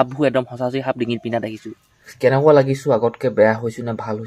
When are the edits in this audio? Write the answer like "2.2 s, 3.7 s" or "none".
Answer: 2.1 s